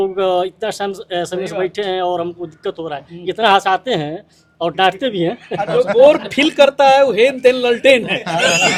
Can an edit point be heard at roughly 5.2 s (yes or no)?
no